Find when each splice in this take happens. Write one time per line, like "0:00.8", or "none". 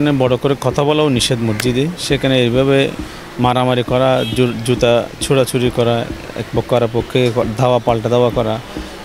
none